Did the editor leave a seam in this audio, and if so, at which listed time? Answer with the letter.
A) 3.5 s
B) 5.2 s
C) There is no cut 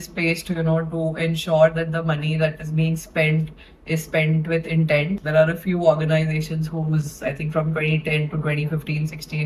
B